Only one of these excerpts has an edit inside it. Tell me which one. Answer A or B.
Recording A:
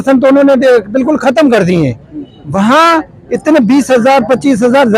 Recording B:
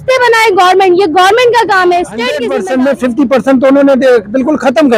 B